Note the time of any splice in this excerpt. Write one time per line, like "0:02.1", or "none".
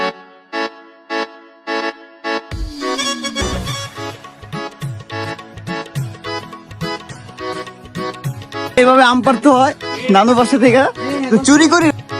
0:03.4
0:08.8